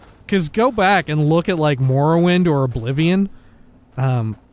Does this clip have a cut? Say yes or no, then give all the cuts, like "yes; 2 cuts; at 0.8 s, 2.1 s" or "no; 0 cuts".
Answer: no; 0 cuts